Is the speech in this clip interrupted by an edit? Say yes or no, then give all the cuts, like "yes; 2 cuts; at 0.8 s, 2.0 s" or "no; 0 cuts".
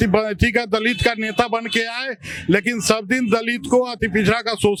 no; 0 cuts